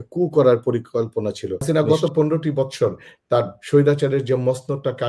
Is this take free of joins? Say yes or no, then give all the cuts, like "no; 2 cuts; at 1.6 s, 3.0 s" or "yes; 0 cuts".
no; 1 cut; at 1.6 s